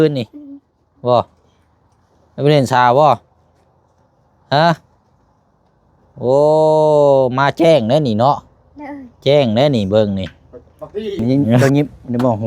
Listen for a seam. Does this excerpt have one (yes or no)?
yes